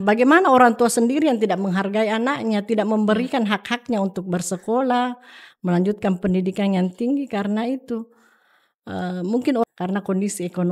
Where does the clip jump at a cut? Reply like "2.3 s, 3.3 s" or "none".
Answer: 9.6 s